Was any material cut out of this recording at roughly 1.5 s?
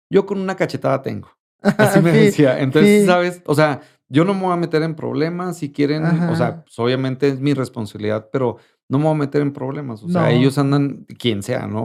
no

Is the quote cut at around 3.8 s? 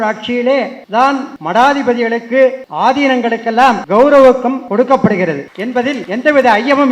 yes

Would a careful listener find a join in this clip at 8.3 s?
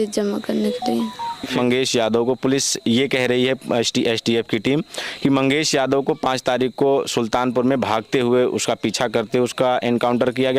no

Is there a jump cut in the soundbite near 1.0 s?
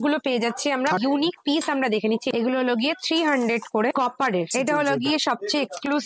yes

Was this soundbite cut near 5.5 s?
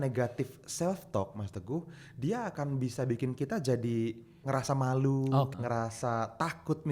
yes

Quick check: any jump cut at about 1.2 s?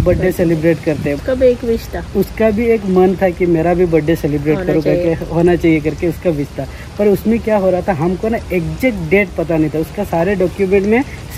yes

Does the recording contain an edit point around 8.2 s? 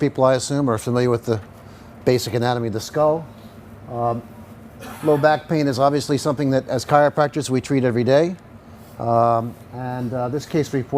yes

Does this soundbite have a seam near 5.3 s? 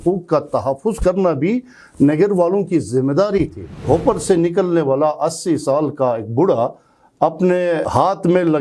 no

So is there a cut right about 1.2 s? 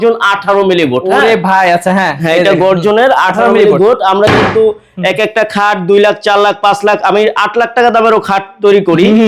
no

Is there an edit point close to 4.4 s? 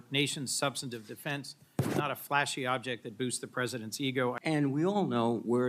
yes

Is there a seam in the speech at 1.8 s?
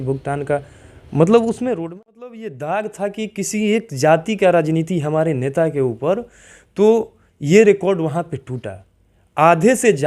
yes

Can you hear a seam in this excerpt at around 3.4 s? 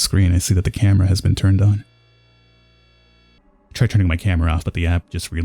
yes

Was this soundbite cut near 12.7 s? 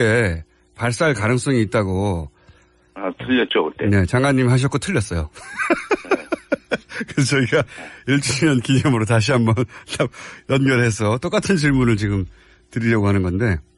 yes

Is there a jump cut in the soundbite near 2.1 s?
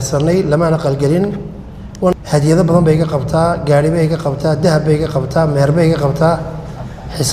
yes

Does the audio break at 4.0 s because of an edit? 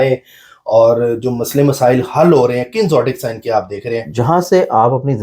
yes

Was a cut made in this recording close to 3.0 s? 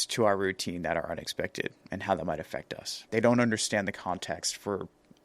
yes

